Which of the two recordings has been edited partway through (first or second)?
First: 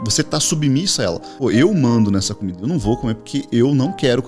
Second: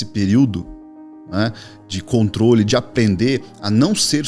first